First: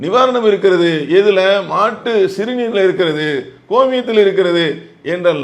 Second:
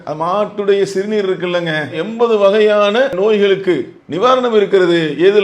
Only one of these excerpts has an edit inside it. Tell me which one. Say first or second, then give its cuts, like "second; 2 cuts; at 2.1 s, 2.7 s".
second; 1 cut; at 3.1 s